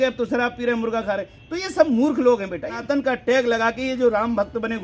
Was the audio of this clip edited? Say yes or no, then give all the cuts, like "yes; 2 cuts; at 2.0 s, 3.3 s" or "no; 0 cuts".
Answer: yes; 1 cut; at 2.8 s